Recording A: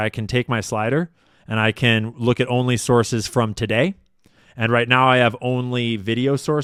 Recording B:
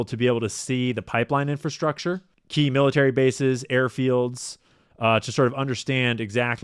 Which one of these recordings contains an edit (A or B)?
B